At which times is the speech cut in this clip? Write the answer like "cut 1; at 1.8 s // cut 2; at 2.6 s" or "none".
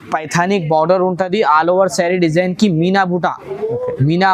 none